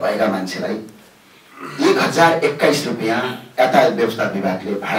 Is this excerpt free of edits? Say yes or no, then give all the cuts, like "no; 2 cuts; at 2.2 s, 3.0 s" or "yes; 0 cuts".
yes; 0 cuts